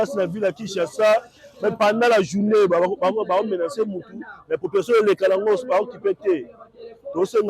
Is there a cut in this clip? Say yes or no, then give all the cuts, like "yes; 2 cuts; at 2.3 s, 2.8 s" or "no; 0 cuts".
no; 0 cuts